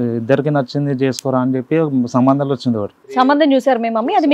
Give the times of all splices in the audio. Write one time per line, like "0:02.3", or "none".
0:03.0